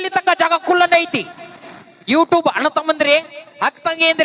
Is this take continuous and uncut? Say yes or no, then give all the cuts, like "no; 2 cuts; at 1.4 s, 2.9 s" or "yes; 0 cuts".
yes; 0 cuts